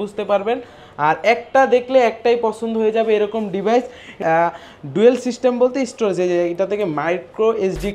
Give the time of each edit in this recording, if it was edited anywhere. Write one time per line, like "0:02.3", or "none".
0:04.2

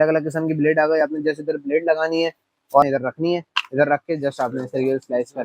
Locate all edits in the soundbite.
0:02.8

